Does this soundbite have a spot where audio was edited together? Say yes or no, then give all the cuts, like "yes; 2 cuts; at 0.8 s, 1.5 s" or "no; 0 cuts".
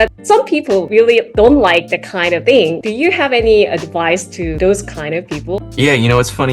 yes; 3 cuts; at 1.1 s, 2.4 s, 4.5 s